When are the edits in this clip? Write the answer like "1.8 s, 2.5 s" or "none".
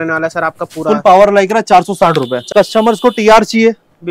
2.4 s